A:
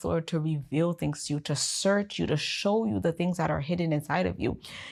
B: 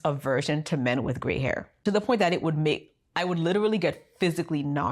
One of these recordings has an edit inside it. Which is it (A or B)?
B